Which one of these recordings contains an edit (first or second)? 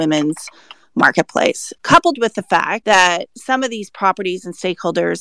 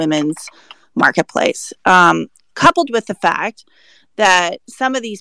first